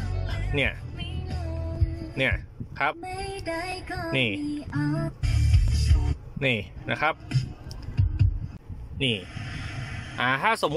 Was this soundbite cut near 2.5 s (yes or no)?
no